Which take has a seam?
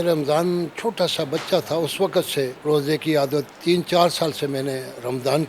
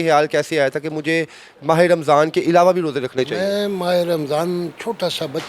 first; 1 cut; at 2.6 s

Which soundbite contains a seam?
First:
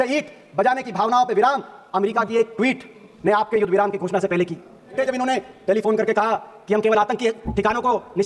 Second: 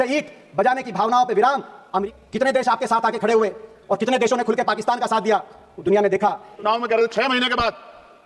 second; 2 cuts; at 2.1 s, 6.7 s

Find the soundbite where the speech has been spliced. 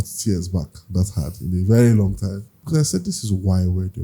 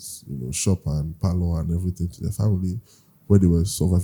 first; 1 cut; at 2.5 s

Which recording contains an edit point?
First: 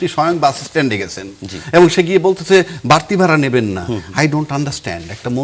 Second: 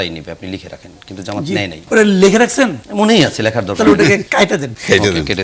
second; 3 cuts; at 1.8 s, 2.8 s, 4.5 s

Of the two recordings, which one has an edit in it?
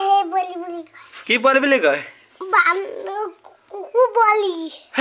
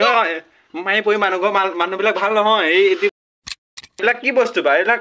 second; 1 cut; at 3.5 s

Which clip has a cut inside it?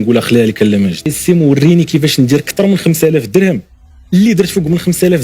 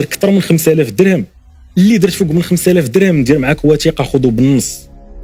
first; 1 cut; at 1.1 s

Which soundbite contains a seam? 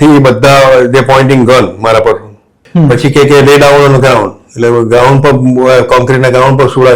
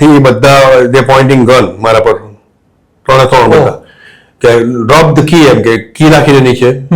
first; 1 cut; at 2.6 s

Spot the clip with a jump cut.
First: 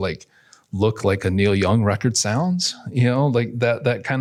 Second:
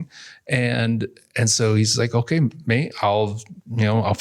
second; 1 cut; at 2.9 s

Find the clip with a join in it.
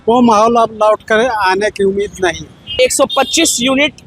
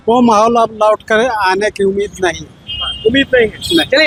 first; 1 cut; at 2.7 s

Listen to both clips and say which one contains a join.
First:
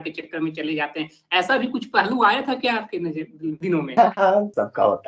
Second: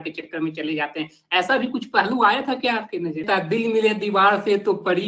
second; 1 cut; at 3.2 s

